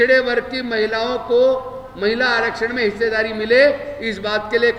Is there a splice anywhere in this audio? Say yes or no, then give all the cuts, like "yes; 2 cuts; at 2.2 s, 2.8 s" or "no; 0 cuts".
no; 0 cuts